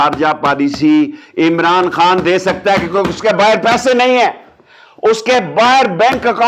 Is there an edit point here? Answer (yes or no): no